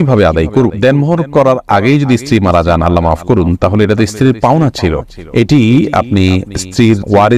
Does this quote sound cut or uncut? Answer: uncut